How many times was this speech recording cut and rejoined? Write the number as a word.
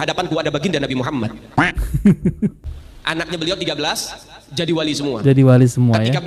one